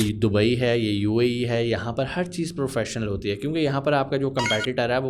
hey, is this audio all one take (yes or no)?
yes